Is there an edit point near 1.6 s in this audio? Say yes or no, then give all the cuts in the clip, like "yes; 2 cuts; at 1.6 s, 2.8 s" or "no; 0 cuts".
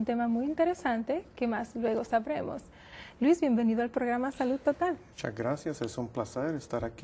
no; 1 cut; at 5.0 s